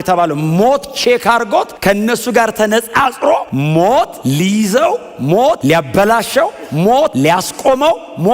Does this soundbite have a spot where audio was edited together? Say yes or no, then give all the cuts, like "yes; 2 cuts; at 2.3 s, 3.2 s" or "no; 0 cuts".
yes; 5 cuts; at 1.7 s, 3.5 s, 4.2 s, 5.6 s, 7.1 s